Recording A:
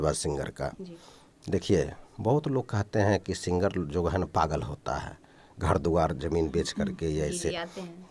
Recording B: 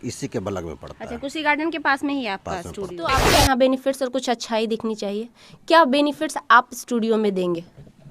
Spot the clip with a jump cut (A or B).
B